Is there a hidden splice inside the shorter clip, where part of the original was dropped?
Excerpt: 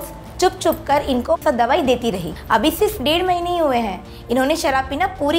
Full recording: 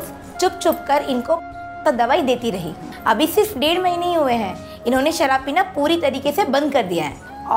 yes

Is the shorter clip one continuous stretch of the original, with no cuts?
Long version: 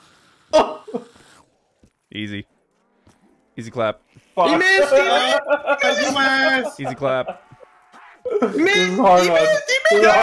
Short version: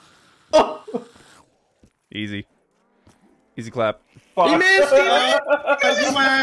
yes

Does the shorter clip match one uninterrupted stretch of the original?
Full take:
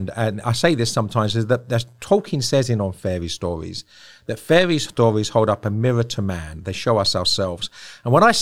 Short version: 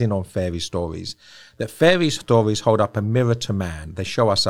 yes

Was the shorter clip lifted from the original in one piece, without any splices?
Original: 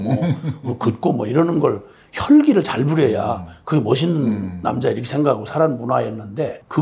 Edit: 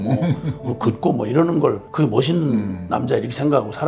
no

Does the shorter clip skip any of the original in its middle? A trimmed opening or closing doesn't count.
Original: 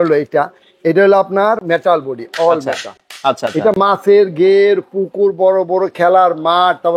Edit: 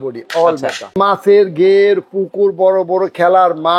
yes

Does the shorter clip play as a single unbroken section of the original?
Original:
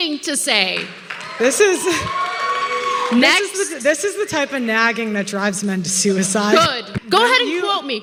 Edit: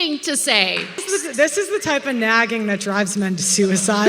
no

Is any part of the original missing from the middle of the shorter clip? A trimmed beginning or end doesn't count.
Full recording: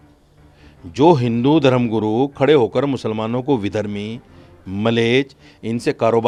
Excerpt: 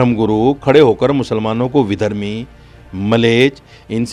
no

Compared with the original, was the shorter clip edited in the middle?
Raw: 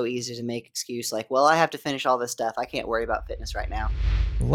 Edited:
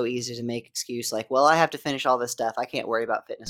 no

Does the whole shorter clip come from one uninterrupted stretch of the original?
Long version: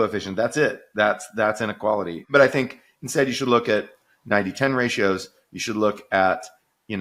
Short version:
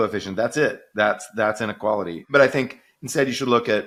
yes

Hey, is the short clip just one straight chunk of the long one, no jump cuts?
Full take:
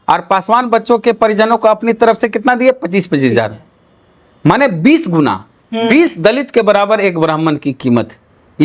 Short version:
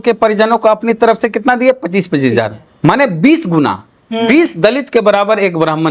no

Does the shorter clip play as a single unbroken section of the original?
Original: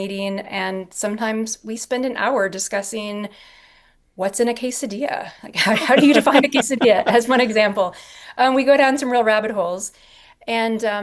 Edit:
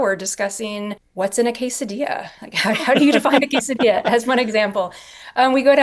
no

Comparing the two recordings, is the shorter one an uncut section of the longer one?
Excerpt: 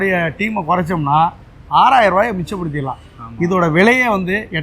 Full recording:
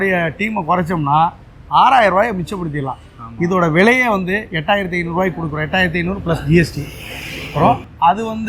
yes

